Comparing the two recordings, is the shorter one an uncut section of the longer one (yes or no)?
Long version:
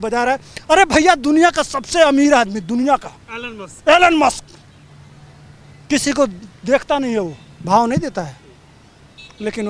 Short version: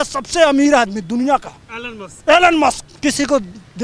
no